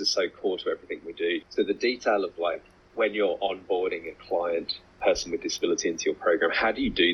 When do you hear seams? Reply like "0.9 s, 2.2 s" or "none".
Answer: none

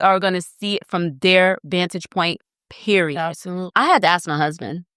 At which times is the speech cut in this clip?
3.7 s

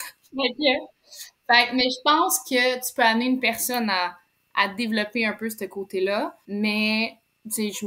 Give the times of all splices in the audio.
6.4 s

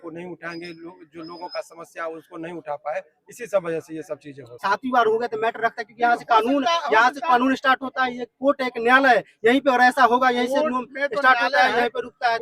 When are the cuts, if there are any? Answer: 4.5 s

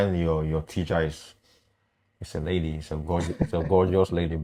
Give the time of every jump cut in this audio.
none

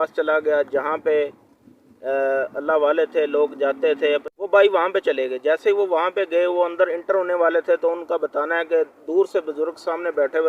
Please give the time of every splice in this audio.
4.3 s

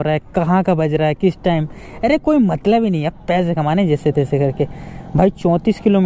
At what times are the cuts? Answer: none

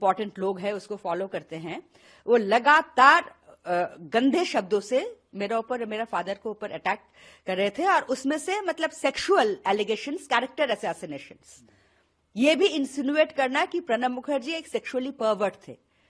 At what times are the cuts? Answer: none

